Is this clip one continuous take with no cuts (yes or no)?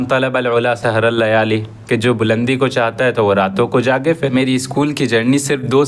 no